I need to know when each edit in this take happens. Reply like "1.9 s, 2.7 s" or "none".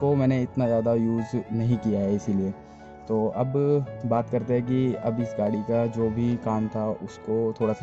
none